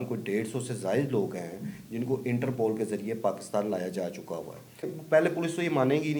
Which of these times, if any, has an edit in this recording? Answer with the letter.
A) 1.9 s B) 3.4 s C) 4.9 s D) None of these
C